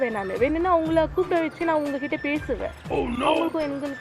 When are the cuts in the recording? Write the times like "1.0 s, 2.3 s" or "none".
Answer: none